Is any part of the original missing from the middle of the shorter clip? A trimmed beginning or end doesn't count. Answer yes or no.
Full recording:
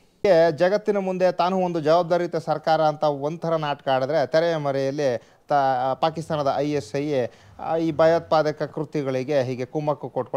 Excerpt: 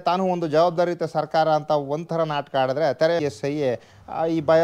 yes